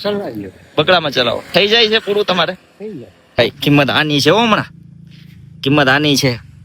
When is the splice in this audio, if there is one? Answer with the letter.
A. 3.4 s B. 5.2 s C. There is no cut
A